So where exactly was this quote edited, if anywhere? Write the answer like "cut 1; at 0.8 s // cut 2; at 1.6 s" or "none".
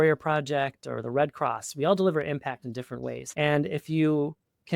cut 1; at 3.2 s

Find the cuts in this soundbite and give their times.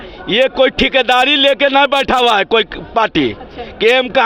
none

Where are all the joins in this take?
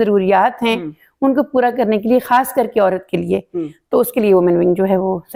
none

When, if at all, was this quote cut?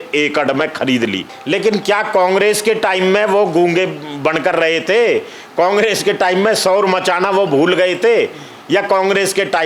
cut 1; at 1.3 s

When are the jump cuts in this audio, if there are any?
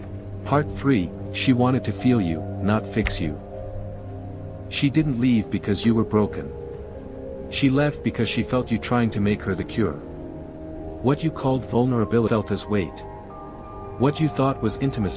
cut 1; at 12.3 s

